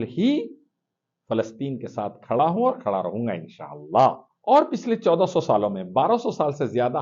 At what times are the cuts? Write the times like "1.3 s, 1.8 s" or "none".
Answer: 4.3 s